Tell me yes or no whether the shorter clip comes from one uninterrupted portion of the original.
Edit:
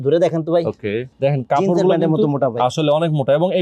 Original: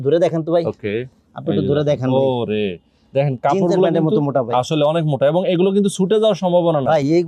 no